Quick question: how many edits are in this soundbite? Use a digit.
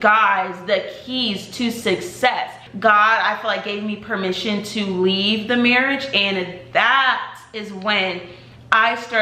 1